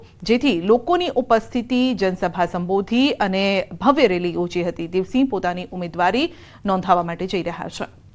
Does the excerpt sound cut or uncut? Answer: cut